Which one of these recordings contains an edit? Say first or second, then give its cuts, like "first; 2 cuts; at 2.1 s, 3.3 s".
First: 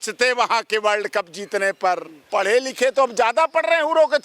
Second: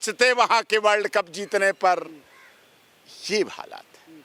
first; 1 cut; at 2.1 s